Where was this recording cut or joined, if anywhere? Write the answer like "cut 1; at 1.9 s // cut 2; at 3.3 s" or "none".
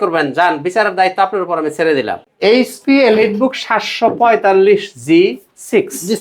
cut 1; at 2.2 s